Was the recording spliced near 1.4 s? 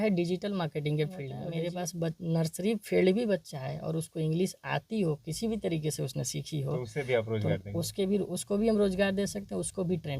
yes; 1 cut; at 1.4 s

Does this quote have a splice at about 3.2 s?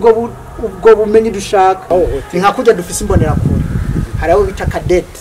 no; 1 cut; at 1.9 s

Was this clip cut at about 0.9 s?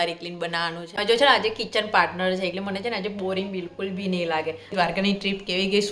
yes; 2 cuts; at 0.9 s, 4.7 s

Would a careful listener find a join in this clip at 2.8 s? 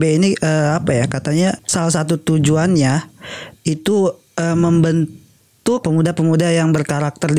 no; 2 cuts; at 1.6 s, 5.8 s

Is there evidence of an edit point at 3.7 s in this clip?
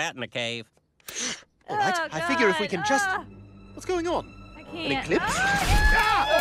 no; 0 cuts

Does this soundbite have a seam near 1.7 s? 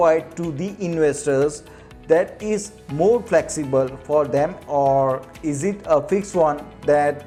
no; 0 cuts

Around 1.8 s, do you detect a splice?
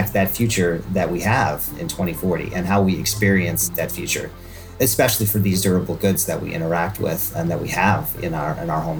no; 1 cut; at 4.8 s

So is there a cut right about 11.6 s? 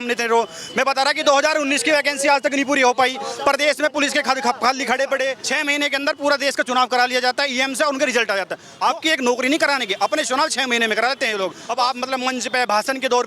yes; 3 cuts; at 5.4 s, 8.6 s, 11.6 s

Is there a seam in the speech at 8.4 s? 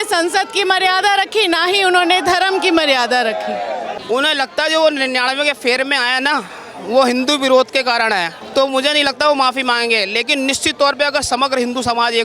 yes; 2 cuts; at 3.9 s, 8.4 s

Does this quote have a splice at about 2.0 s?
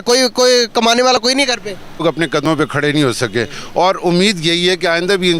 yes; 1 cut; at 2.0 s

